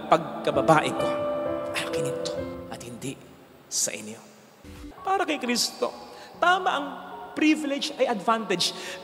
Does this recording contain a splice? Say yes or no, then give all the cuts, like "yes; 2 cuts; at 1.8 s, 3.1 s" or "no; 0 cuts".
yes; 1 cut; at 4.7 s